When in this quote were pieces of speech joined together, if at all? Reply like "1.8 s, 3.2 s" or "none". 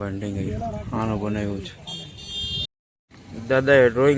2.7 s